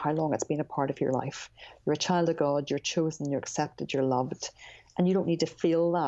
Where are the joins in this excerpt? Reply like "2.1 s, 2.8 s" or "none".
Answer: none